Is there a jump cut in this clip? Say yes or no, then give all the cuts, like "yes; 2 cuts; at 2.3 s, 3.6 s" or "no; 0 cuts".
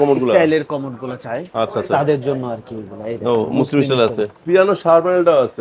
yes; 1 cut; at 4.4 s